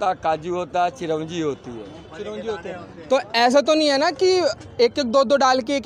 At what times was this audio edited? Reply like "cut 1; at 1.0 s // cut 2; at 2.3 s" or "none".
none